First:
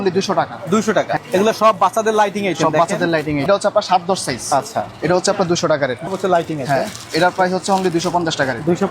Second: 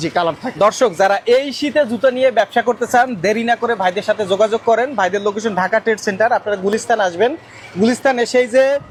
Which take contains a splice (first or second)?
first